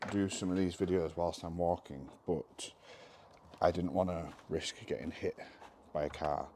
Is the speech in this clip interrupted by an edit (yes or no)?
no